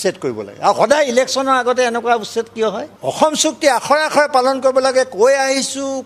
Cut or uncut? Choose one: cut